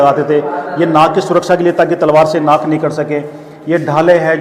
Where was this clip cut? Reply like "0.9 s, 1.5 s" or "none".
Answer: none